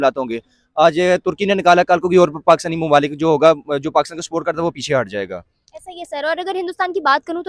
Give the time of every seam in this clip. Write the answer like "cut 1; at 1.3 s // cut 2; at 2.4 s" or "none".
none